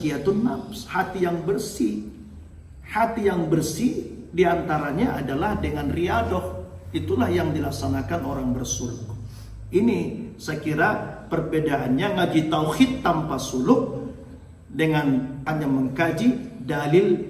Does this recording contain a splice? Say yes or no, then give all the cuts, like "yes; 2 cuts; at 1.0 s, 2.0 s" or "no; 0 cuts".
yes; 1 cut; at 15.5 s